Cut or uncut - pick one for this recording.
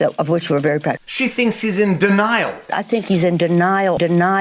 uncut